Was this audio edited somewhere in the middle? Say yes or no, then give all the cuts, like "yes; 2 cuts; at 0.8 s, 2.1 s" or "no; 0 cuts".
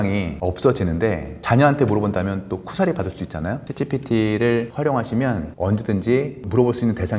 yes; 2 cuts; at 3.6 s, 5.5 s